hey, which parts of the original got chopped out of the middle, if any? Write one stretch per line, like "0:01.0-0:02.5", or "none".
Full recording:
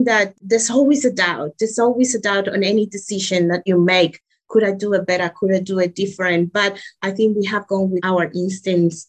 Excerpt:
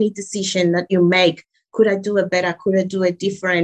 none